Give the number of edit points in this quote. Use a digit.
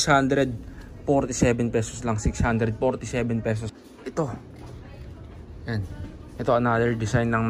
1